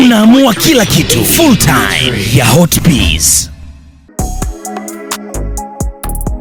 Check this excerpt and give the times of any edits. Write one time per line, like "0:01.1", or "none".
none